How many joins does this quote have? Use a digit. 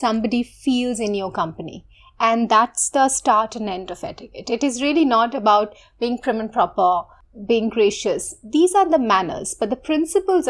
1